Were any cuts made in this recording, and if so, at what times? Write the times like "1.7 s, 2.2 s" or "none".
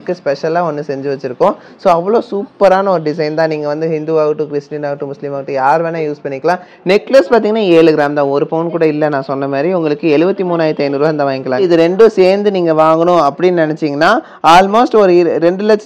6.7 s, 11.6 s